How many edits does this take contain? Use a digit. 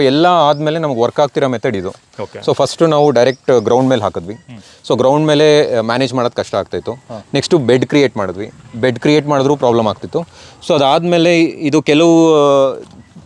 0